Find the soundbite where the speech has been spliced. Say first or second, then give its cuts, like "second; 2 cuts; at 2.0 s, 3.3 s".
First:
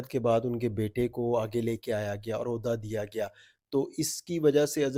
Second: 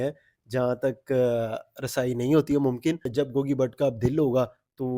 second; 1 cut; at 3.1 s